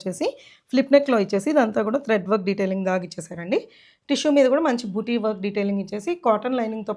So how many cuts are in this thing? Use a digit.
0